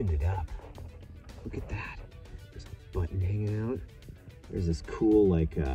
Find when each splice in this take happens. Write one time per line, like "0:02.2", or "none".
none